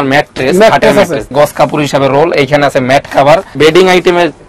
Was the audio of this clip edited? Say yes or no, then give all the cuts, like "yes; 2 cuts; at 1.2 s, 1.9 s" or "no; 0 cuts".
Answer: yes; 2 cuts; at 1.3 s, 3.5 s